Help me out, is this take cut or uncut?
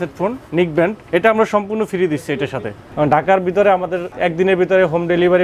cut